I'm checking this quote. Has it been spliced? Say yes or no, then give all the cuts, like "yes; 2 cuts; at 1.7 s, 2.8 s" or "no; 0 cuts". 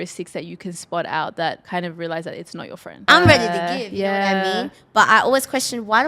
yes; 2 cuts; at 1.6 s, 3.1 s